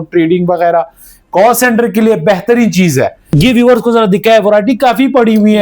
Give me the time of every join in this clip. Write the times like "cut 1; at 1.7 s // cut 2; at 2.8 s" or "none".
cut 1; at 3.2 s